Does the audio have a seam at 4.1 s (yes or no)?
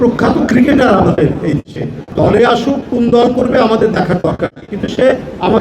no